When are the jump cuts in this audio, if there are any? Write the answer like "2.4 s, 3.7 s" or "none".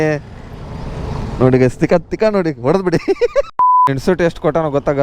3.9 s